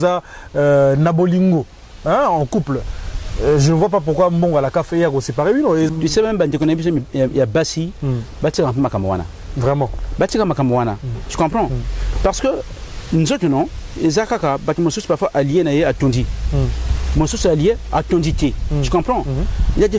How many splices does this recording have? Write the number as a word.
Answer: one